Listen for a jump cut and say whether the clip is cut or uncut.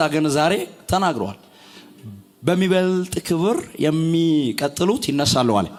uncut